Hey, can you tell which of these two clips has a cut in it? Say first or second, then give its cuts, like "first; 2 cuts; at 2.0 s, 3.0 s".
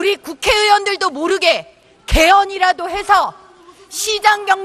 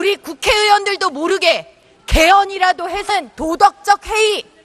first; 1 cut; at 3.0 s